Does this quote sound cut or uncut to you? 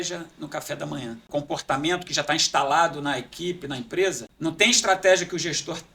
cut